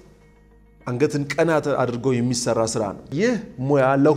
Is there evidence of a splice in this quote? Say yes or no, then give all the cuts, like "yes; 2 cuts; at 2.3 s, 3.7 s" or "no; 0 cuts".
yes; 1 cut; at 3.1 s